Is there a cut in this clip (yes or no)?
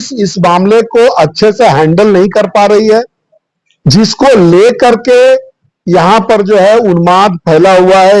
no